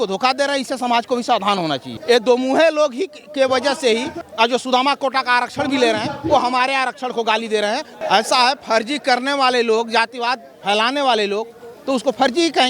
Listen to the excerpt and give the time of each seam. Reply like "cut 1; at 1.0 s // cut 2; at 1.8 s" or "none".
cut 1; at 1.9 s // cut 2; at 4.2 s // cut 3; at 7.9 s